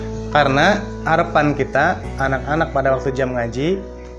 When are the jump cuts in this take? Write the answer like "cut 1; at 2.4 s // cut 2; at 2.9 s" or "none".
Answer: none